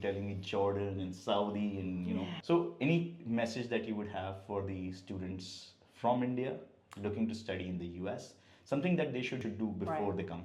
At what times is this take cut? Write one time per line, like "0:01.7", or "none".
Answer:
0:02.3
0:09.4